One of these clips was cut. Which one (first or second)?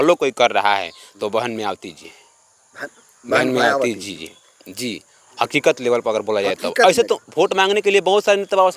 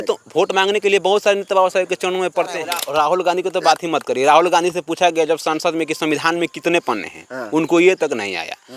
second